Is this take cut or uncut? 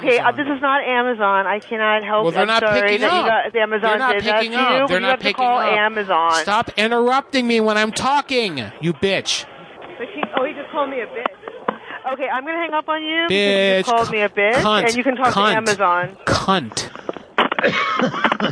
uncut